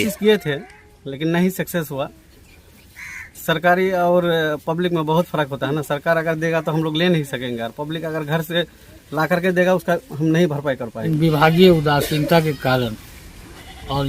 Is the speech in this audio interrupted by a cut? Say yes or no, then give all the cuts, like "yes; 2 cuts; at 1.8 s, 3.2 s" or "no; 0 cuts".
yes; 1 cut; at 11.0 s